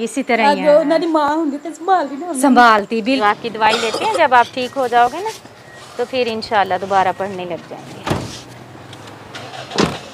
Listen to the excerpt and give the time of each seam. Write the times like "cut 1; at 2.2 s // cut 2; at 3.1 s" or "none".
cut 1; at 3.2 s

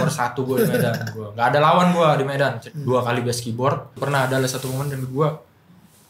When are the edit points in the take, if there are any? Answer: cut 1; at 2.7 s // cut 2; at 3.9 s

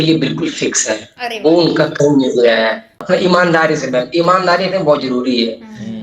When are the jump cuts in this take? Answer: cut 1; at 3.0 s

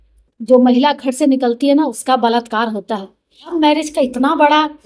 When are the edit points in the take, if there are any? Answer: cut 1; at 3.5 s

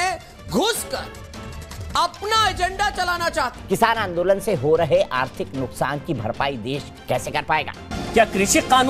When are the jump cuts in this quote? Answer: cut 1; at 3.6 s // cut 2; at 7.9 s

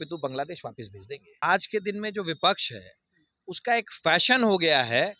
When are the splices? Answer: cut 1; at 1.4 s

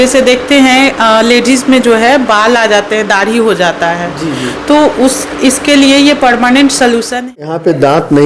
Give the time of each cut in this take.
cut 1; at 7.3 s

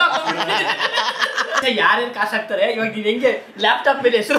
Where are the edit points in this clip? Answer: cut 1; at 1.5 s

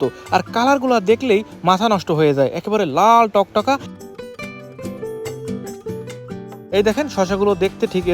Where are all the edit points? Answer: cut 1; at 6.5 s

